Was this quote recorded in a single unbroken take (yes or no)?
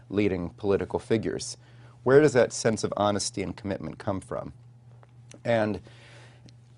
no